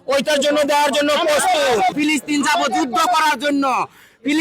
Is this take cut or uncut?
cut